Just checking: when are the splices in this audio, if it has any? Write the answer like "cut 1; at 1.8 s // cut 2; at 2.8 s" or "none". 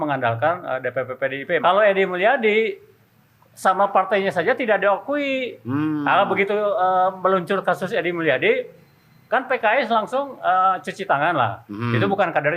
cut 1; at 1.6 s